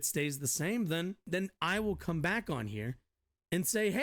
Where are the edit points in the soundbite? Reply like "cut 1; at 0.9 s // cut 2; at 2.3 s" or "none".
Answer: cut 1; at 1.3 s